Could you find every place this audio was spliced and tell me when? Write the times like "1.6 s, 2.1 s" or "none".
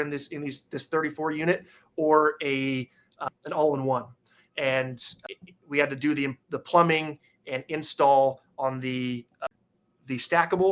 3.2 s, 5.2 s, 9.5 s